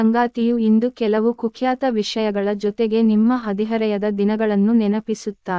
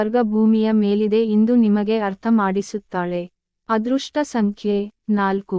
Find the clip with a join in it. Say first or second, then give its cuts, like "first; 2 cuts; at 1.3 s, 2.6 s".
second; 1 cut; at 4.5 s